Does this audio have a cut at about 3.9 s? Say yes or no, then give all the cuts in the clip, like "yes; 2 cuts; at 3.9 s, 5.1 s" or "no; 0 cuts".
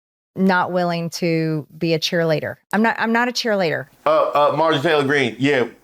yes; 1 cut; at 3.9 s